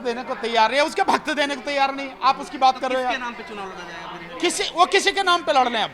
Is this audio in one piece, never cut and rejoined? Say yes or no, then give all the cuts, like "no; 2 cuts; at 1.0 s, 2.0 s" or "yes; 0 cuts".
yes; 0 cuts